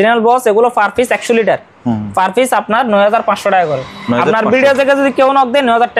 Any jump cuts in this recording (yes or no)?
no